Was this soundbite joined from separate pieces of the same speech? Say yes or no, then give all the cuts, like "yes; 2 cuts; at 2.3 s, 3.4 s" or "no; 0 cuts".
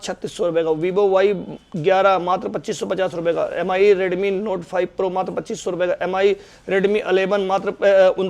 no; 0 cuts